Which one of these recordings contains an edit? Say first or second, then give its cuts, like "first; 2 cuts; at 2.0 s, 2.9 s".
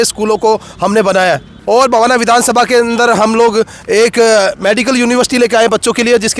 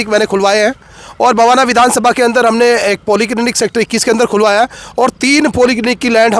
first; 1 cut; at 1.5 s